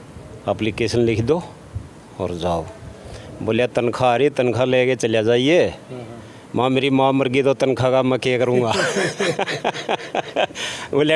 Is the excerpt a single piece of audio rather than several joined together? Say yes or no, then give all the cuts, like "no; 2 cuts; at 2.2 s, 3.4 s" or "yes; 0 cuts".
yes; 0 cuts